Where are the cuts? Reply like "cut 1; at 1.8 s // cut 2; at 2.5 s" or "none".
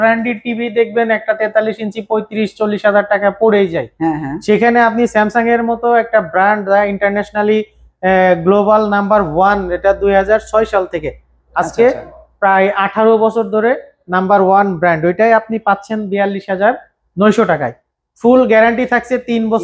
none

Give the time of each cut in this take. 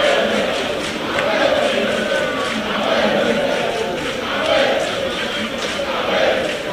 none

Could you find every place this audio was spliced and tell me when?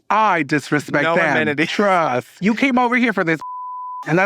cut 1; at 2.3 s

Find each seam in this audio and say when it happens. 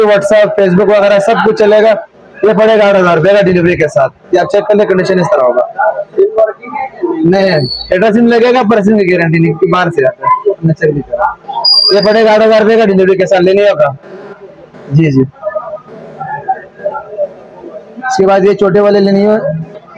none

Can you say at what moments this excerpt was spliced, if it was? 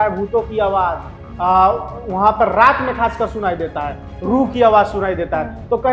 none

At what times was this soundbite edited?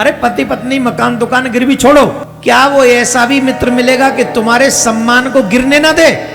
cut 1; at 2.3 s

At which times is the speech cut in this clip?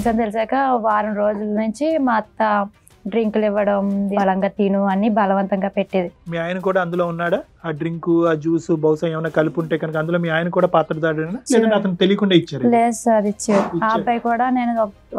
cut 1; at 4.1 s // cut 2; at 6.2 s

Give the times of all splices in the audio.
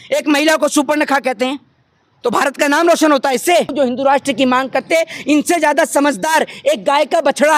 cut 1; at 3.7 s

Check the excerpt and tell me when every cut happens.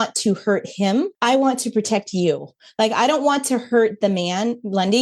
cut 1; at 1.1 s

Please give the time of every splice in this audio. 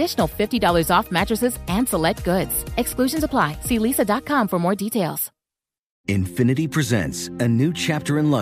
cut 1; at 5.9 s

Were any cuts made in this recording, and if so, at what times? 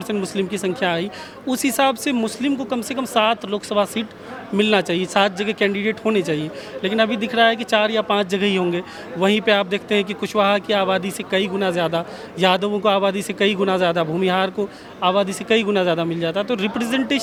none

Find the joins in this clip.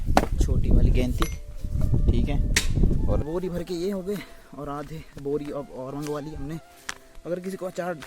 cut 1; at 3.2 s

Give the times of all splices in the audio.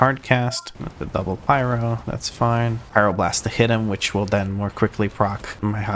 cut 1; at 2.8 s

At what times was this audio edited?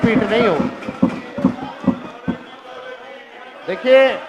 none

